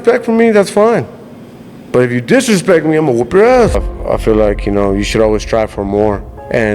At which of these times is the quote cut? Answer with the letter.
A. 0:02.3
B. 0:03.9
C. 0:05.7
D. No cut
B